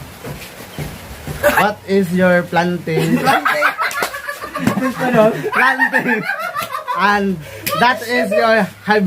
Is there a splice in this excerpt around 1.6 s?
yes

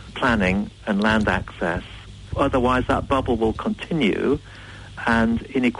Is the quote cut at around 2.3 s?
yes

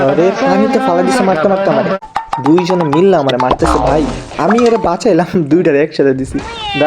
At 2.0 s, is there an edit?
yes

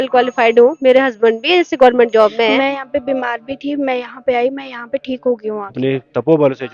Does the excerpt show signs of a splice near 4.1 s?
no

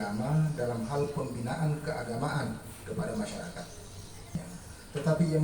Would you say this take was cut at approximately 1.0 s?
no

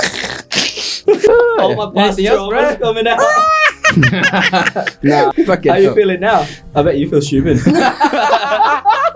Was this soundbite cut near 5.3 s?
yes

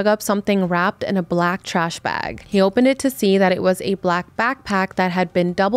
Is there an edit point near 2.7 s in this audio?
no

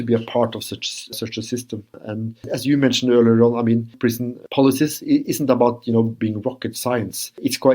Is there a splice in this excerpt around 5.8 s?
no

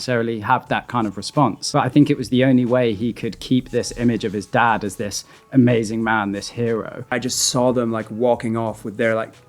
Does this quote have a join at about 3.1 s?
no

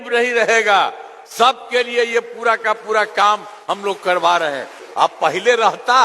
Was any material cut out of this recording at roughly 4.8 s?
yes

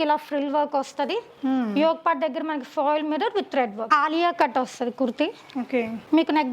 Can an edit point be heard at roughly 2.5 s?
no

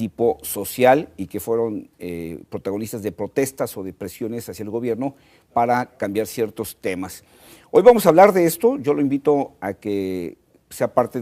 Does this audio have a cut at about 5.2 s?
yes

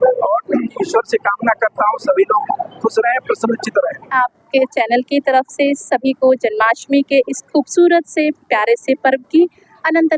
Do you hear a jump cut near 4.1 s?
yes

